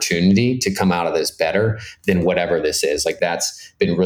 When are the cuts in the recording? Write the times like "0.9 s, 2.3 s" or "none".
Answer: 3.2 s